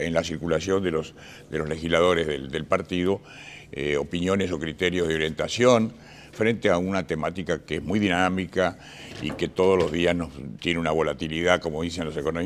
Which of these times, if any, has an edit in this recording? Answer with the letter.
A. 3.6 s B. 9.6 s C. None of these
A